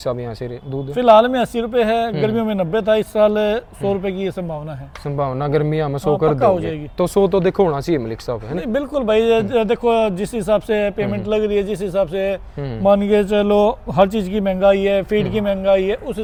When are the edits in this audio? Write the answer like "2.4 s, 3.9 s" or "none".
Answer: none